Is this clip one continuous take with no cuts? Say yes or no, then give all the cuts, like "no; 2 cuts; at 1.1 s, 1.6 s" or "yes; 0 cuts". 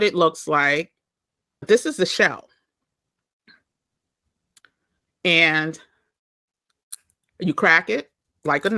no; 1 cut; at 1.7 s